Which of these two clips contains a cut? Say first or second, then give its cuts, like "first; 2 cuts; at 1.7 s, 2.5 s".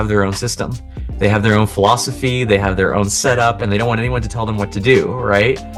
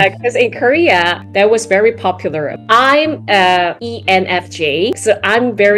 second; 3 cuts; at 2.6 s, 3.9 s, 5.0 s